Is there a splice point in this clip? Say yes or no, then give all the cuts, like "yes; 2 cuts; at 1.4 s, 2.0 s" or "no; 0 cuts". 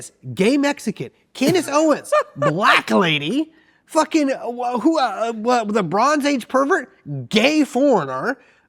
no; 0 cuts